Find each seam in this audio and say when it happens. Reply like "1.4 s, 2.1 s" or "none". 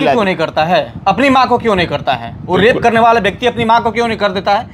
none